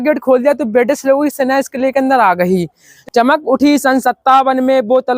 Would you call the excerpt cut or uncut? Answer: cut